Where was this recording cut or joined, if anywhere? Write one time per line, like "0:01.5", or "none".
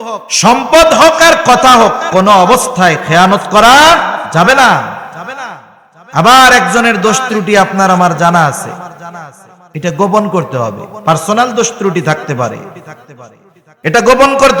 none